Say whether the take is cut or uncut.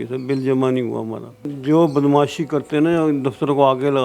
cut